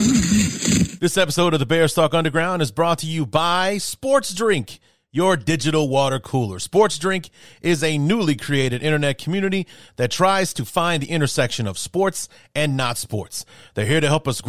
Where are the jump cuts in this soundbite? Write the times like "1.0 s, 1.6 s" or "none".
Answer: 0.9 s